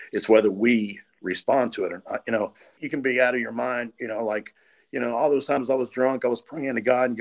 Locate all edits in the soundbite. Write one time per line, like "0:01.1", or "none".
0:02.8